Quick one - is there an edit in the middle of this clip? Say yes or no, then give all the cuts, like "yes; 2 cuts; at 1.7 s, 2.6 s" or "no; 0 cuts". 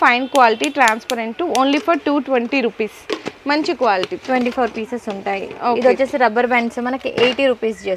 no; 0 cuts